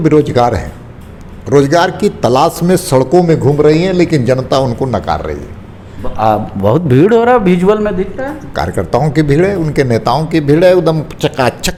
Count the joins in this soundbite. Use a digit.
0